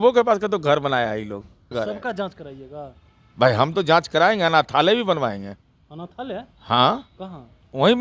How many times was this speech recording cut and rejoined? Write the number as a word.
one